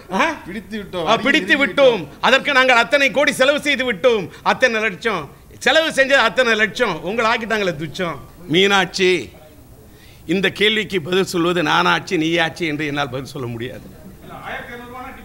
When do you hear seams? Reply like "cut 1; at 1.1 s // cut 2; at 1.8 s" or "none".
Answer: cut 1; at 8.3 s